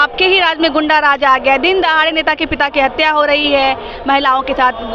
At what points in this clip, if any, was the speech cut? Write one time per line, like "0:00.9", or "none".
none

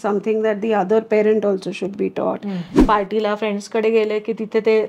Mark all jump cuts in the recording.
0:02.8

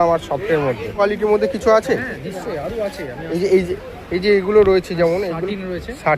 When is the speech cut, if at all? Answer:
0:01.0

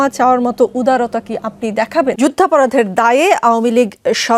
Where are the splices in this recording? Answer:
0:02.2

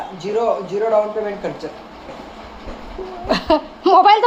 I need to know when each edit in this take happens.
none

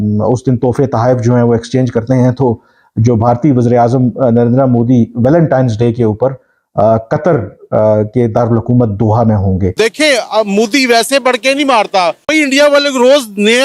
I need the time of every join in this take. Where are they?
0:09.7
0:12.3

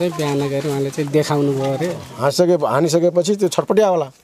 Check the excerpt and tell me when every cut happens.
0:02.1

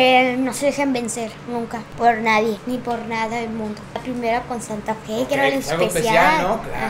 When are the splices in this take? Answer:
0:01.8
0:02.6
0:04.0

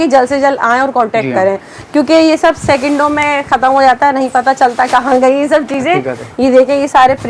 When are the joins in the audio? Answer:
none

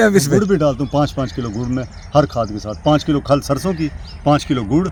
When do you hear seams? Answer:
none

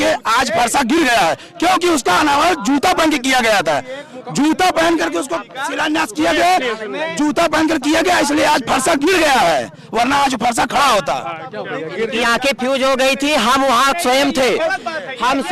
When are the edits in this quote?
none

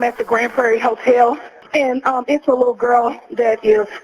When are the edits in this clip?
0:01.5

